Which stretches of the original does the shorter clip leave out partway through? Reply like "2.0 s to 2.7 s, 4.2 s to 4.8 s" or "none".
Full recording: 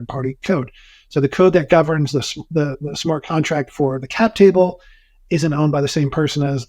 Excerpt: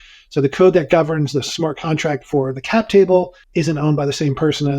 2.3 s to 3.0 s, 4.8 s to 5.1 s